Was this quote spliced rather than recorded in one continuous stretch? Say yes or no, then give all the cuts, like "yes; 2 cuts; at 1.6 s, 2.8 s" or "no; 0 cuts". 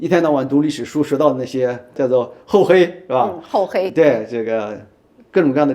yes; 1 cut; at 2.0 s